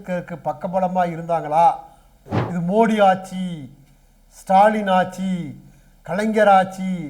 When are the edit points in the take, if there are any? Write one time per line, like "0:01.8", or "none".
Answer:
0:02.2